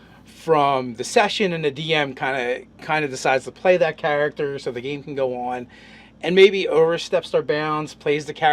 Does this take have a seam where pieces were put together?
yes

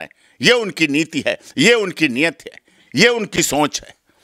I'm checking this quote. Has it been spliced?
no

